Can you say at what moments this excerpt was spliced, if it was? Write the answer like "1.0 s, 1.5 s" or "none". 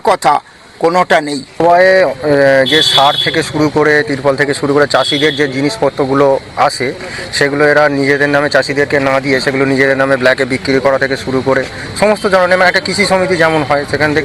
1.6 s